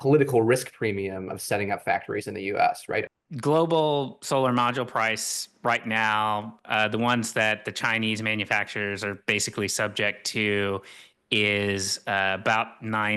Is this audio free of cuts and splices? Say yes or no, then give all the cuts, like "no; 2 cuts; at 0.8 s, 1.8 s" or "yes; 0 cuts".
no; 1 cut; at 3.0 s